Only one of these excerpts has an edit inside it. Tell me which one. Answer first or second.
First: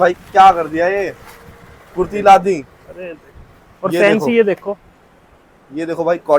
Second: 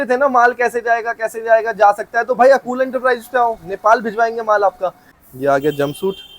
second